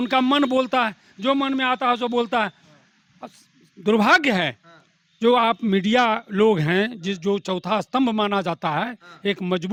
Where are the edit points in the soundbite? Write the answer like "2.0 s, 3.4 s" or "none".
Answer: none